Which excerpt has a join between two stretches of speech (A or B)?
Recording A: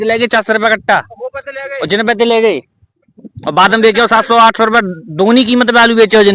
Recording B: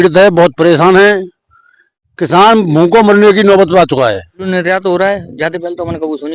B